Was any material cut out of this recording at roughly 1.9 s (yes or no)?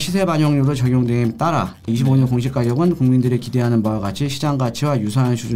yes